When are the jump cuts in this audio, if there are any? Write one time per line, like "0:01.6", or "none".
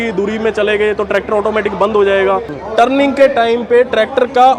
0:02.5